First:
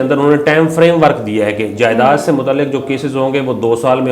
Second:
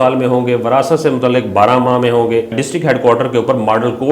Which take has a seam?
second; 1 cut; at 2.6 s

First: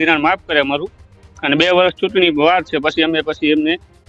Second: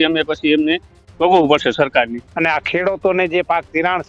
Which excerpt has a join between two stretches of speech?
second; 1 cut; at 2.2 s

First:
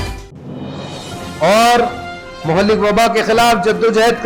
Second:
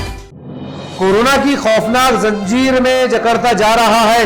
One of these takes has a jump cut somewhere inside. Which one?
first; 1 cut; at 0.9 s

